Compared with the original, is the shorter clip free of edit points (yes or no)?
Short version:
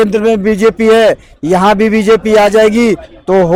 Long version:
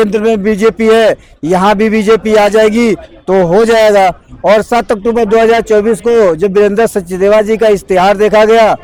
yes